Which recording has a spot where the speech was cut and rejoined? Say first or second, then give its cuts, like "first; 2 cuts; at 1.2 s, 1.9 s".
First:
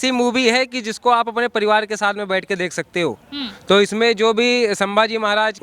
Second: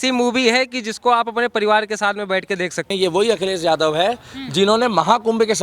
second; 1 cut; at 2.9 s